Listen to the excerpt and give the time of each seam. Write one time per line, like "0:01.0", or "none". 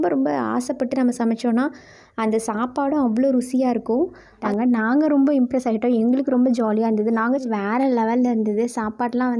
0:04.4
0:07.4